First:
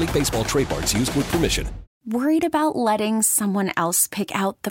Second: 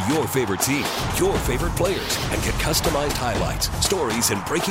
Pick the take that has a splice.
first; 1 cut; at 2.0 s

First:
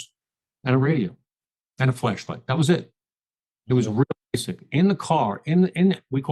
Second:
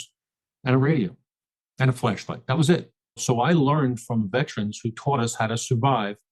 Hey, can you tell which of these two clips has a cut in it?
second; 1 cut; at 3.2 s

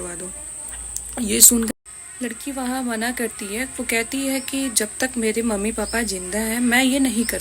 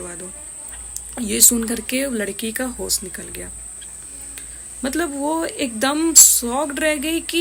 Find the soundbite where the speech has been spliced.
first; 1 cut; at 1.7 s

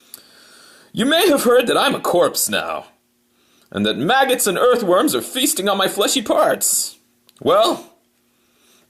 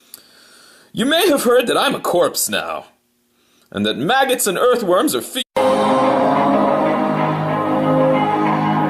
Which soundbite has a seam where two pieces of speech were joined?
first; 1 cut; at 5.5 s

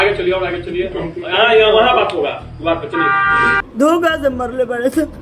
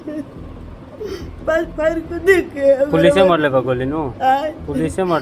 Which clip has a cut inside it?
first; 1 cut; at 3.6 s

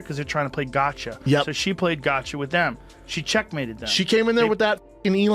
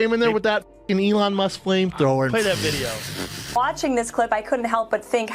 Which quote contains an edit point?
second; 1 cut; at 3.6 s

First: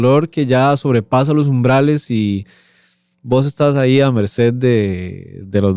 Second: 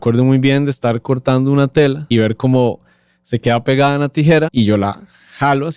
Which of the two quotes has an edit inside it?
second; 2 cuts; at 2.0 s, 4.5 s

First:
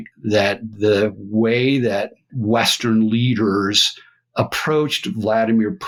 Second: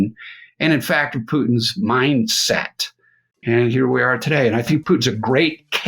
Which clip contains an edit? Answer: second; 2 cuts; at 3.3 s, 4.7 s

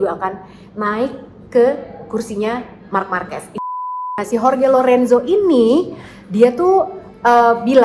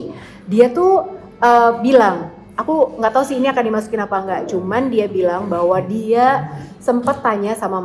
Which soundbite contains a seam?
first; 1 cut; at 3.7 s

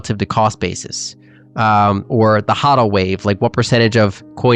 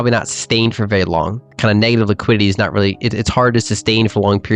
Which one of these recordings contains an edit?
second; 1 cut; at 1.4 s

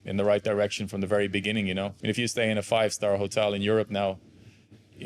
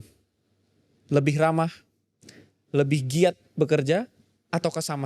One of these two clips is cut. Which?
first; 1 cut; at 2.0 s

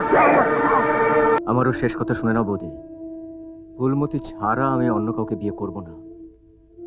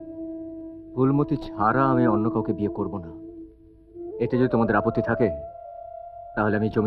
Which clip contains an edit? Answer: first; 1 cut; at 1.4 s

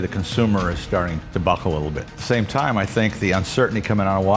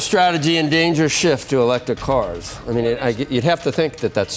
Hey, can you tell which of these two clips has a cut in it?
first; 2 cuts; at 1.2 s, 2.1 s

